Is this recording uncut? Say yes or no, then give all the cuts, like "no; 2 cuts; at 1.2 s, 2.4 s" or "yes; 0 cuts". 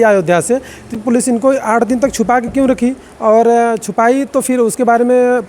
no; 1 cut; at 0.9 s